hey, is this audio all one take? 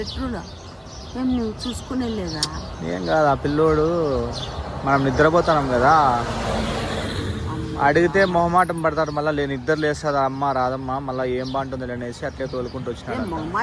yes; 0 cuts

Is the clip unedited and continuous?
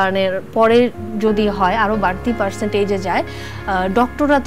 yes; 0 cuts

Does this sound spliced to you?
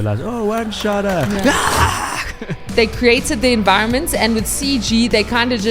yes; 1 cut; at 2.7 s

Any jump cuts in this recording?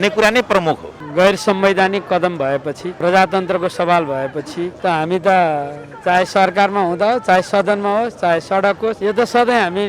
yes; 4 cuts; at 1.0 s, 2.9 s, 4.7 s, 9.0 s

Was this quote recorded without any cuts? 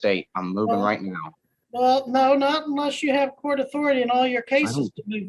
yes; 0 cuts

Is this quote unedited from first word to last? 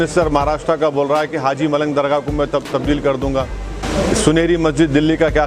no; 1 cut; at 3.8 s

